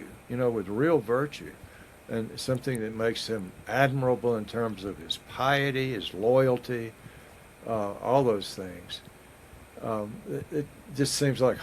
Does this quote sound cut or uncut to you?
uncut